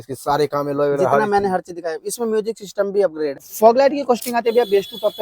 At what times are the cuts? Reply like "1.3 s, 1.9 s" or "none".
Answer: 3.4 s